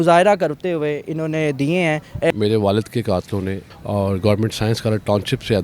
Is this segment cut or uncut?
cut